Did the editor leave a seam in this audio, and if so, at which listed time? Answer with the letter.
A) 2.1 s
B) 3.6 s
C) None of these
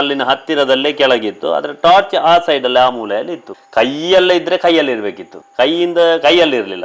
B